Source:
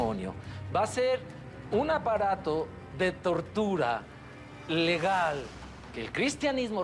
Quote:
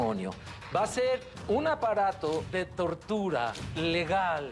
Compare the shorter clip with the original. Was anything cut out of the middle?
yes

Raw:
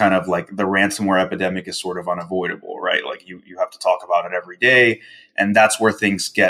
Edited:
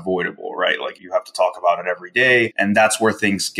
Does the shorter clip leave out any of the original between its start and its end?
yes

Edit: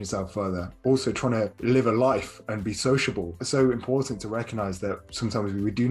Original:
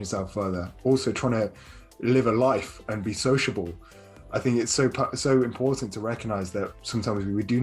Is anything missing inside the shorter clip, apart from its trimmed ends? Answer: yes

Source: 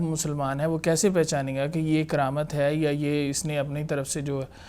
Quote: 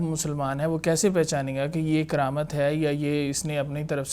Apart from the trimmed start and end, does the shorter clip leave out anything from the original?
no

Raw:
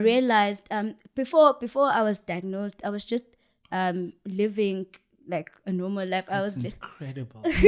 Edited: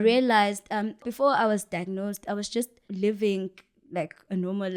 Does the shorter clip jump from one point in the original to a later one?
yes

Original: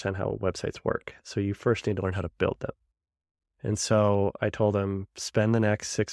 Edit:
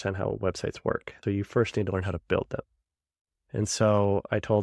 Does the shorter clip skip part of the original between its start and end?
yes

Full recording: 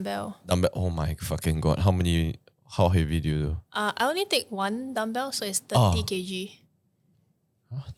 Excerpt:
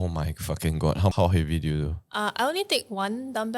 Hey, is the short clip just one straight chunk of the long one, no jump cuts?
no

